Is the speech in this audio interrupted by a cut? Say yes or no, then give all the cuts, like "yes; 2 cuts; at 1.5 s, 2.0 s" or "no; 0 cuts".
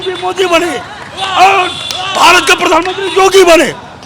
no; 0 cuts